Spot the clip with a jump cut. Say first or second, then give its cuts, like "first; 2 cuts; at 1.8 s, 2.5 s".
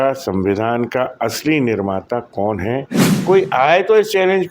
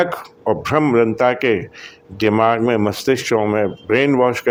first; 1 cut; at 3.0 s